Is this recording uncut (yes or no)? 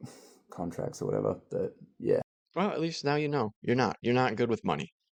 yes